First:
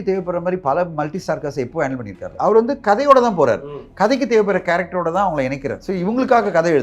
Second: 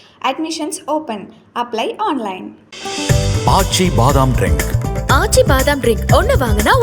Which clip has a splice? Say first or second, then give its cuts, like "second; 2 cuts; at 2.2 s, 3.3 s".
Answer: first; 2 cuts; at 2.3 s, 5.8 s